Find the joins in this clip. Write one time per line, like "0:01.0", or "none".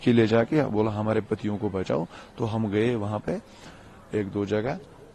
none

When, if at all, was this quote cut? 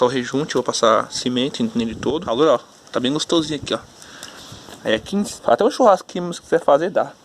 0:02.3
0:05.3

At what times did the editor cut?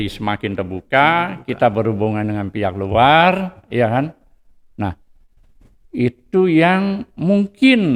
none

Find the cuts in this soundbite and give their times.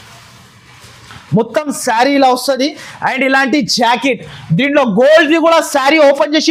none

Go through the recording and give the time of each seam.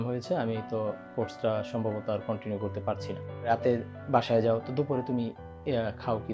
0:03.4

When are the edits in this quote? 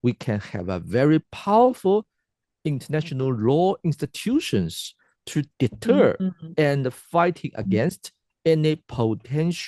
none

